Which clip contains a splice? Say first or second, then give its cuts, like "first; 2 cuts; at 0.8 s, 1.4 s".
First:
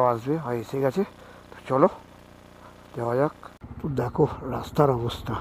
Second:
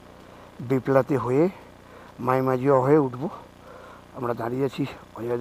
first; 1 cut; at 3.4 s